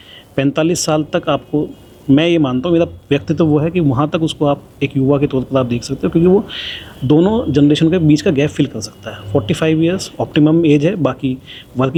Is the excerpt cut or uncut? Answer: uncut